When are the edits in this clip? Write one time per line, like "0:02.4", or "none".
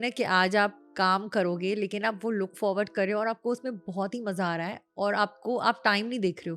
none